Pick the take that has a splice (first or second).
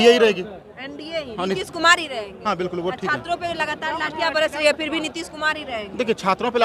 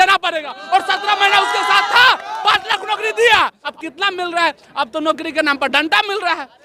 second